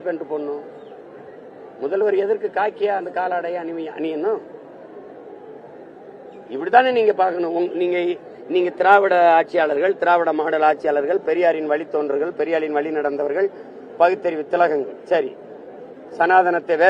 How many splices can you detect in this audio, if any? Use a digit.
0